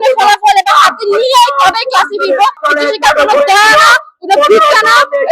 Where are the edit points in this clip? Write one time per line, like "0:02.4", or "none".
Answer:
0:02.6